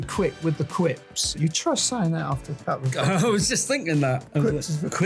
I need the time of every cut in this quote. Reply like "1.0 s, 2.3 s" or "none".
1.2 s